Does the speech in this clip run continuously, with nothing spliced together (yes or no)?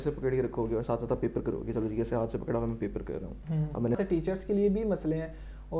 no